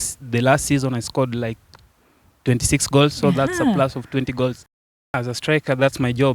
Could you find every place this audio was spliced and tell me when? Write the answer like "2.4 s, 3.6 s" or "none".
4.7 s